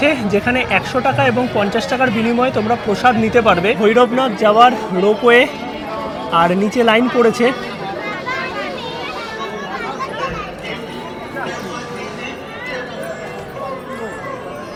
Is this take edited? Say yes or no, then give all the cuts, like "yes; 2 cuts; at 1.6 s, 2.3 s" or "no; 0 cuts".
no; 0 cuts